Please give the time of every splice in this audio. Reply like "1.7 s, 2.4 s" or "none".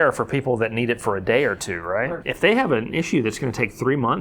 2.2 s